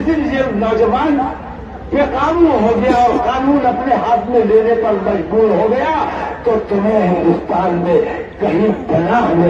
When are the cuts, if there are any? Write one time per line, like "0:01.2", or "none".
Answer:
none

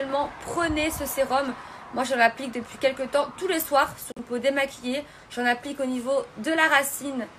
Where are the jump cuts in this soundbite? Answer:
0:04.2

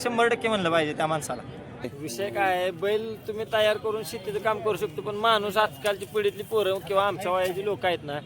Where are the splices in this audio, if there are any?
0:02.0

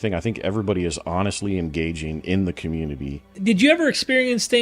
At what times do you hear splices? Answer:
0:03.3

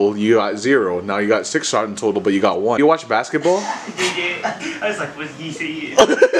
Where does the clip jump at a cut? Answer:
0:02.8

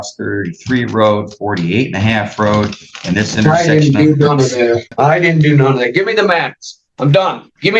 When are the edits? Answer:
0:04.9

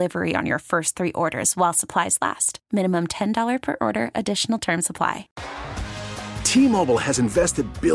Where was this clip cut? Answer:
0:05.3

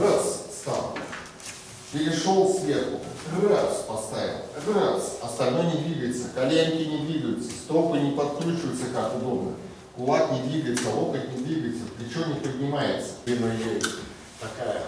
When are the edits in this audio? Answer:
0:13.3

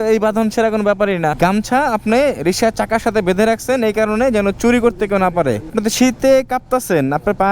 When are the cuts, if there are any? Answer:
0:01.4
0:05.7

